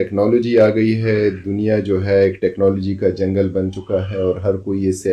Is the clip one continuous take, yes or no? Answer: yes